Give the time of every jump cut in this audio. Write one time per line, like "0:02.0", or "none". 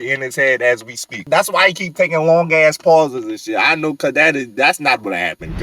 0:01.3